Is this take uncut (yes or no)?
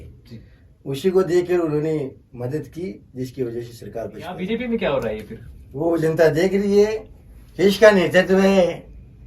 no